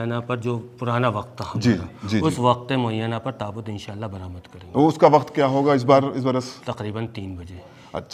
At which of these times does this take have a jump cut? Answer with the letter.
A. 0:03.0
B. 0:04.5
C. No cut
C